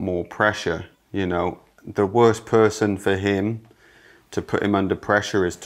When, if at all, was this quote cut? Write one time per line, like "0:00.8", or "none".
none